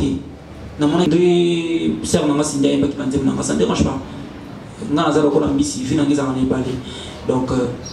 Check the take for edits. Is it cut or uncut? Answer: cut